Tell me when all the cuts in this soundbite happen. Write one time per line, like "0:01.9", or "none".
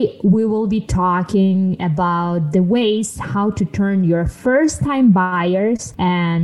none